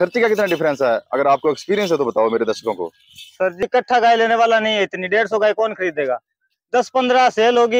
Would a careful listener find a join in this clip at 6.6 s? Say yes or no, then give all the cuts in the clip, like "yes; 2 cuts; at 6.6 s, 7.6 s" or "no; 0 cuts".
no; 1 cut; at 3.6 s